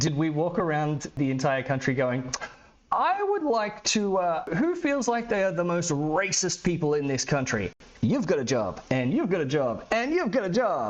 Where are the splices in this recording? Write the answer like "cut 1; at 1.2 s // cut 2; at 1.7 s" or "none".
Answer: cut 1; at 1.1 s // cut 2; at 4.5 s